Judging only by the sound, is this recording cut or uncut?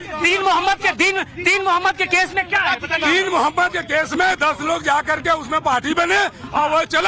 cut